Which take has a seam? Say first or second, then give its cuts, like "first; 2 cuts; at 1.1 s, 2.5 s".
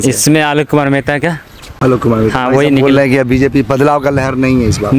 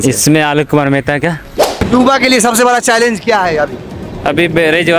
second; 1 cut; at 1.8 s